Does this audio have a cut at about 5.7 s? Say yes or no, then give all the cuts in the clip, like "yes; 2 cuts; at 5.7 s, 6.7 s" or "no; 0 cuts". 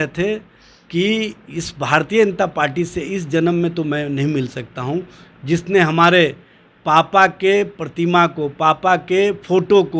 no; 0 cuts